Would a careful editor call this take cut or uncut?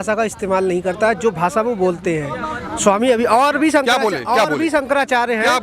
uncut